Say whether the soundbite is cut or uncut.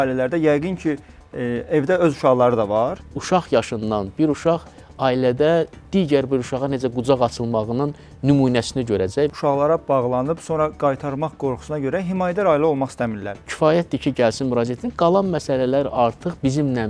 cut